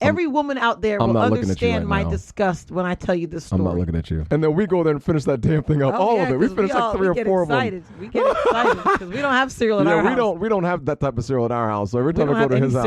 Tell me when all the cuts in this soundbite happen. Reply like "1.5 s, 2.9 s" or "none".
4.1 s